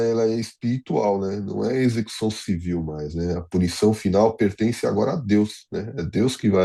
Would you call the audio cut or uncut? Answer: uncut